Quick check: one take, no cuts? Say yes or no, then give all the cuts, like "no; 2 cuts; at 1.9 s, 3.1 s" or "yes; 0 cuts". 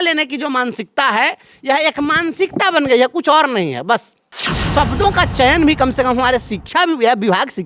no; 1 cut; at 4.3 s